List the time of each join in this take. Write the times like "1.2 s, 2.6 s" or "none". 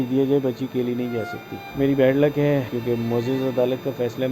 1.7 s, 2.7 s